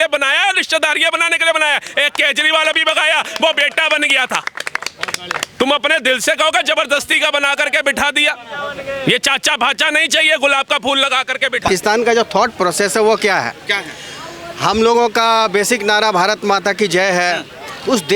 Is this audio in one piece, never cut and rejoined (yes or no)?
yes